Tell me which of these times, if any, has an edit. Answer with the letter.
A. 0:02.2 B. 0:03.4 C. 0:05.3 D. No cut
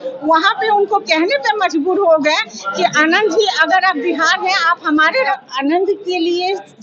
C